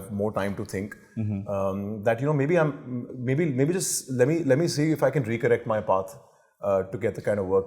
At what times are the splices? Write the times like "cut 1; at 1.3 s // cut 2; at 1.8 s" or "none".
none